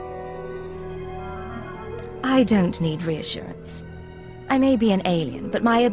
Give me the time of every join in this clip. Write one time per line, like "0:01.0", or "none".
none